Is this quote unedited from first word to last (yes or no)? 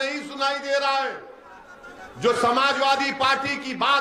yes